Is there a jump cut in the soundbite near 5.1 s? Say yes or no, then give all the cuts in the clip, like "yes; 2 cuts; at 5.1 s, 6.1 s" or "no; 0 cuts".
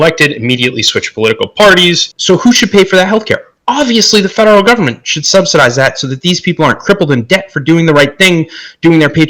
no; 1 cut; at 2.1 s